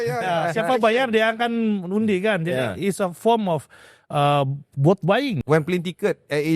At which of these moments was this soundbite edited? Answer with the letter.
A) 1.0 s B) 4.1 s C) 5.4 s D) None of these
C